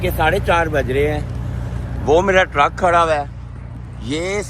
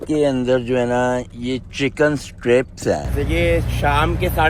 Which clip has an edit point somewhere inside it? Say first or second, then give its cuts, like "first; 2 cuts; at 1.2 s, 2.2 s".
second; 1 cut; at 3.1 s